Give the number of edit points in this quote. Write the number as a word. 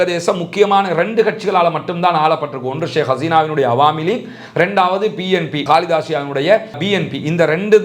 two